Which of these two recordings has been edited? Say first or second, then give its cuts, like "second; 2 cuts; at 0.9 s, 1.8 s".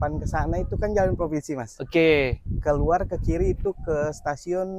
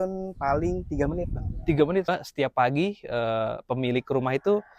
second; 1 cut; at 2.1 s